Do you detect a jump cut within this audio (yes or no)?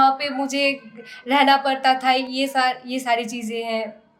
no